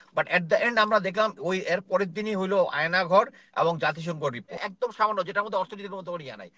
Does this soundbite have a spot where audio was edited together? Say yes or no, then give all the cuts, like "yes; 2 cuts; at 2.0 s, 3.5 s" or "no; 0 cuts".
yes; 1 cut; at 4.7 s